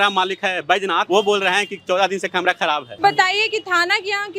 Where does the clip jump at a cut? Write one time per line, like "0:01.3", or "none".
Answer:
0:01.0
0:02.9